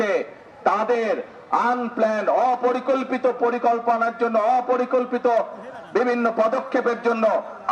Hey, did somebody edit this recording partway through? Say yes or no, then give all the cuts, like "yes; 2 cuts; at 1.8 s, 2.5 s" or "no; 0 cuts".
no; 0 cuts